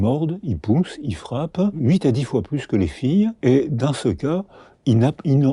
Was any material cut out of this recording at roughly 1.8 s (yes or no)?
yes